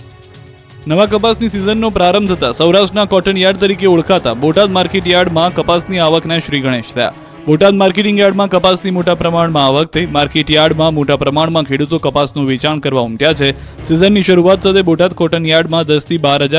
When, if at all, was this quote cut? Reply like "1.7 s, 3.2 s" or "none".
none